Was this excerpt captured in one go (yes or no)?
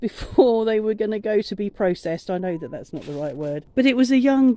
no